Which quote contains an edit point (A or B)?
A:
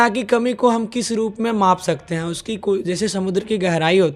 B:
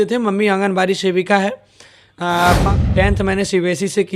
B